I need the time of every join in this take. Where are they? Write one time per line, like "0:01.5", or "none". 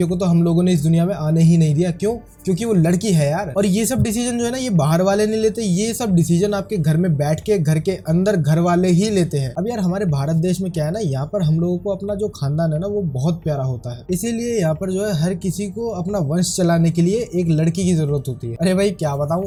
none